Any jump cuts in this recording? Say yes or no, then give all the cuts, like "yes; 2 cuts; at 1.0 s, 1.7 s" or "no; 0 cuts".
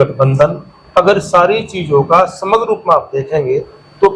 no; 0 cuts